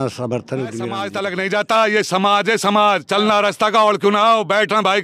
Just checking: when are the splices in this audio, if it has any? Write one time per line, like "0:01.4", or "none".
0:01.1